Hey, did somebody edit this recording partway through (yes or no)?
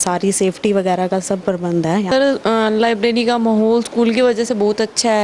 yes